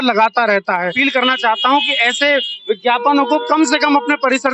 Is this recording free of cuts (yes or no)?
no